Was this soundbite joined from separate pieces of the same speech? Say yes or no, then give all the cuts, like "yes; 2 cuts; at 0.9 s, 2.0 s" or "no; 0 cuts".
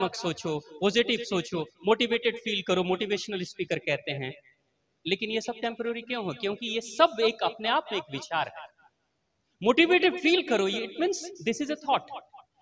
no; 0 cuts